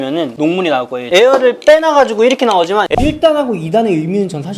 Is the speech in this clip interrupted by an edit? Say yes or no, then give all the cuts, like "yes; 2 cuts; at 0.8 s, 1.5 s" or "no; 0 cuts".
yes; 2 cuts; at 1.0 s, 2.9 s